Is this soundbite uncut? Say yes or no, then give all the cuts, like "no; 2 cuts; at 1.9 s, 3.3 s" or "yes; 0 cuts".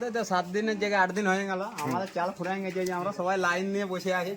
yes; 0 cuts